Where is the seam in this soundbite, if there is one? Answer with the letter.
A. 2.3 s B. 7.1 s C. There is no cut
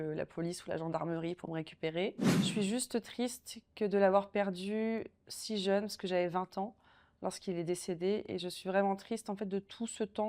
A